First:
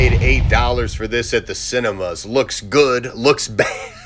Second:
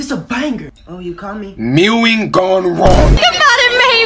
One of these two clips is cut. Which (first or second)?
second